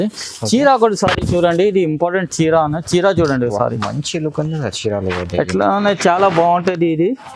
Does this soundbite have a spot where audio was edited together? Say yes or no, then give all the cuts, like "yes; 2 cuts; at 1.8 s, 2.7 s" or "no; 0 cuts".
no; 0 cuts